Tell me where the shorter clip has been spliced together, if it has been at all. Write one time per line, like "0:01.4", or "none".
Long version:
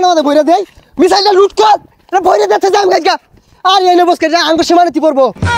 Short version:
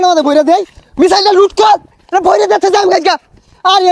none